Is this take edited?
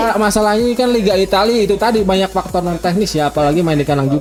no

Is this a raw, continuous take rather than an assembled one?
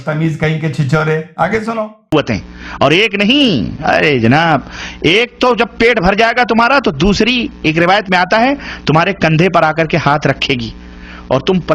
no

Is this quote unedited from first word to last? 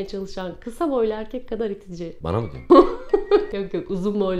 yes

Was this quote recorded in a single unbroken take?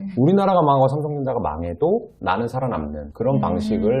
no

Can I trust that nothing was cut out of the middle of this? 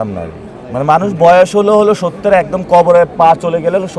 yes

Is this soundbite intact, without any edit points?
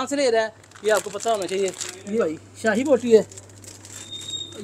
no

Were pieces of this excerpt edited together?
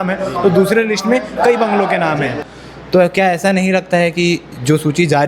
yes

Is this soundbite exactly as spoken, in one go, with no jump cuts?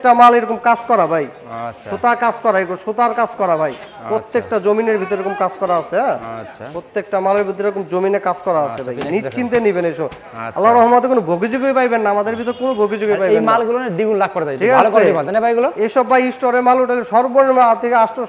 yes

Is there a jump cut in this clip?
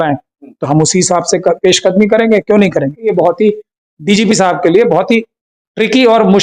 yes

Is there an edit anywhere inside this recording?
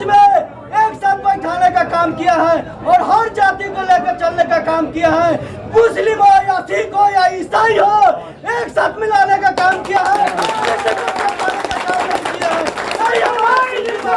no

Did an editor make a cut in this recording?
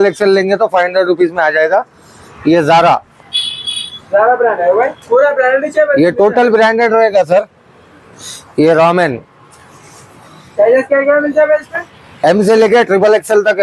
no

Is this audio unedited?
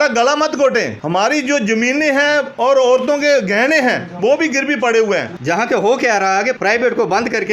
no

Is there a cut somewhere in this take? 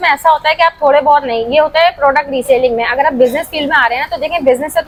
no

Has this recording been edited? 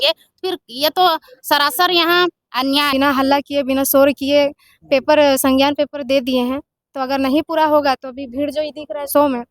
yes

